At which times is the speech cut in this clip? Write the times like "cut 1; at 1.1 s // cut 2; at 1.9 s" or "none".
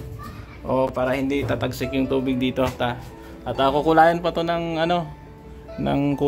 cut 1; at 0.9 s